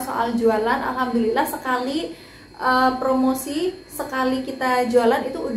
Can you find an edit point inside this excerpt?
no; 0 cuts

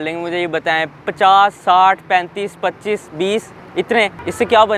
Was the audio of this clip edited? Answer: no; 0 cuts

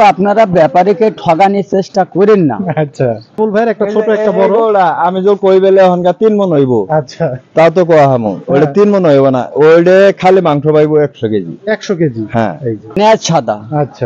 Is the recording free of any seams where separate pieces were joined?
no; 2 cuts; at 3.4 s, 13.0 s

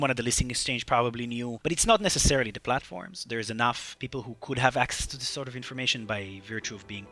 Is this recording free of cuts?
yes; 0 cuts

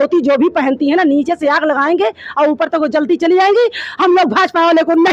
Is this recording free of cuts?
yes; 0 cuts

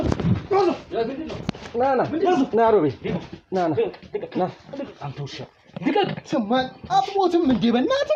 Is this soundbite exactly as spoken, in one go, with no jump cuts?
yes; 0 cuts

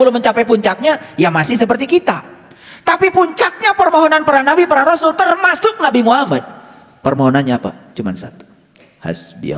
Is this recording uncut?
yes; 0 cuts

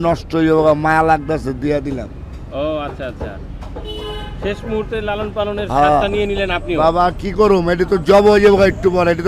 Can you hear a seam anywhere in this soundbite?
no; 0 cuts

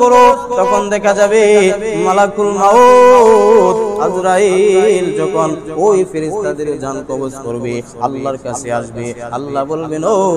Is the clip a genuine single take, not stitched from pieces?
yes; 0 cuts

